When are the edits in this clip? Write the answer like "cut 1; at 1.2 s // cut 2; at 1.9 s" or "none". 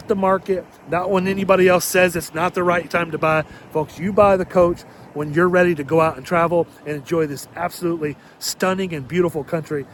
none